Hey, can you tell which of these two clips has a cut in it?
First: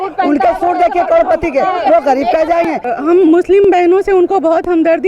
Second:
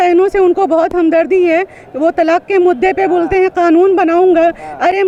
first; 1 cut; at 2.8 s

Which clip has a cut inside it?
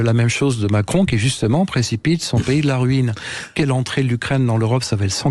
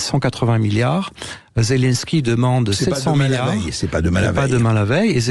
first; 1 cut; at 3.7 s

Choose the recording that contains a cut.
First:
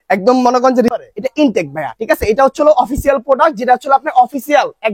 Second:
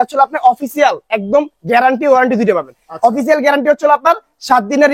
first; 1 cut; at 0.9 s

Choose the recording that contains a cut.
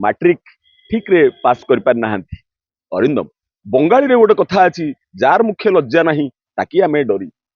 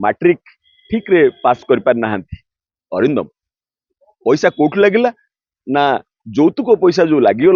first; 1 cut; at 3.5 s

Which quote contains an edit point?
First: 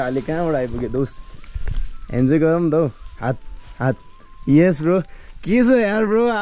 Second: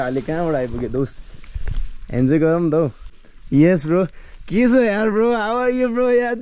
second; 1 cut; at 3.1 s

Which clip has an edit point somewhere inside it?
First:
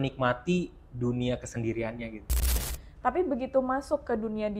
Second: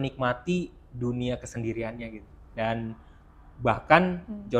first; 1 cut; at 2.5 s

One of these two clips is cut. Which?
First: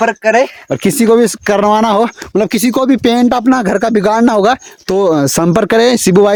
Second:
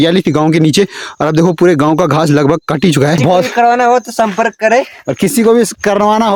second; 1 cut; at 3.2 s

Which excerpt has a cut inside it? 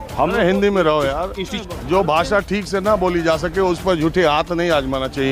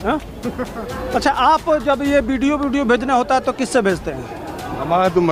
first; 1 cut; at 1.6 s

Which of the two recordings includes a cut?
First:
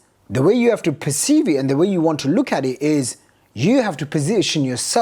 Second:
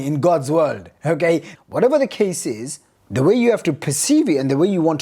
second; 1 cut; at 1.5 s

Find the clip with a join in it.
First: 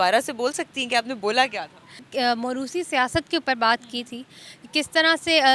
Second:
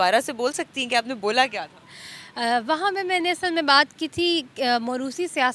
first; 1 cut; at 2.0 s

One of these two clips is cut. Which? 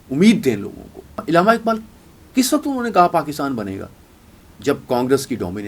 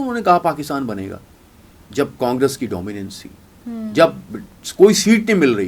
first; 1 cut; at 1.2 s

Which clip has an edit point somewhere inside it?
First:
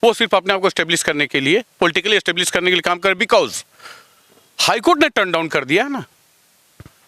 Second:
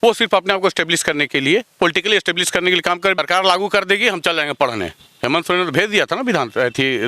second; 1 cut; at 3.2 s

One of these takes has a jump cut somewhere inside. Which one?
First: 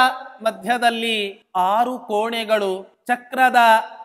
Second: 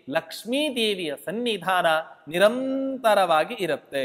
first; 2 cuts; at 1.4 s, 2.9 s

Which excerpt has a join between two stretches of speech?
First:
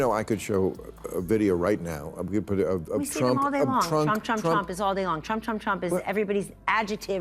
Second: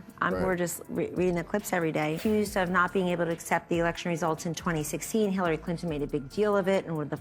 second; 1 cut; at 2.1 s

